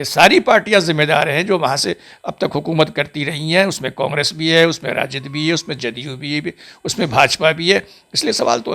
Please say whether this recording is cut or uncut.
uncut